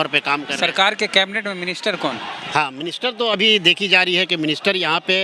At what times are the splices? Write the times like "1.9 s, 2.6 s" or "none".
none

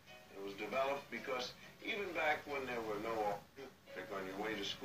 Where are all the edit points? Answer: 3.9 s

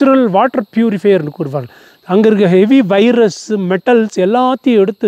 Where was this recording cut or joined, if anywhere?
none

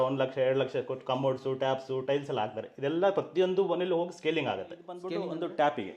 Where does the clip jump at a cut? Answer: 5.0 s

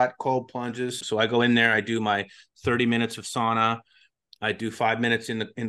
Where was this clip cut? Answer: 1.0 s

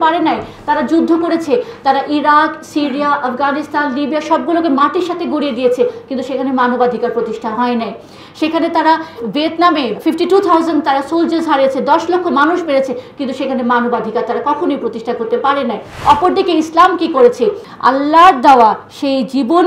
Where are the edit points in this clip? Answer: 15.9 s, 17.7 s

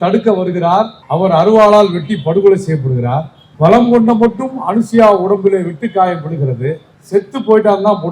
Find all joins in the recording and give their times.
1.0 s, 3.4 s, 6.9 s

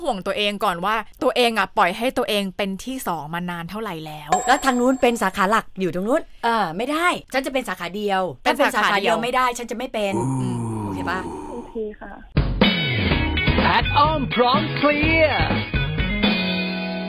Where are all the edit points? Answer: 4.4 s, 7.2 s

